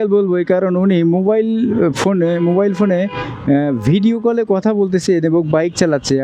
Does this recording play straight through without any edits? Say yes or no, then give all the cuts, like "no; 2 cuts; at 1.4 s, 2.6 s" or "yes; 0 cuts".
yes; 0 cuts